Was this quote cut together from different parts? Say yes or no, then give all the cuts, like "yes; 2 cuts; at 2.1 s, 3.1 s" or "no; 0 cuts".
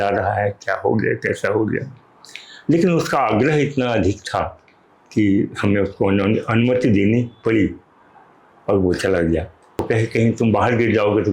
yes; 1 cut; at 9.8 s